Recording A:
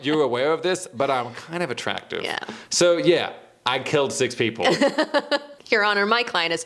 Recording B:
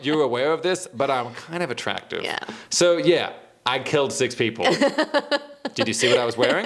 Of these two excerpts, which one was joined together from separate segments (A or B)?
A